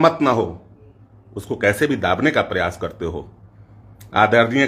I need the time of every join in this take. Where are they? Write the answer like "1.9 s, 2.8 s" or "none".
none